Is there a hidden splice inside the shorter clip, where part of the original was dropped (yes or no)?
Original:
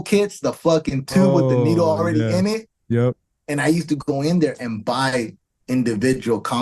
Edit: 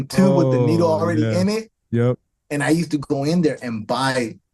no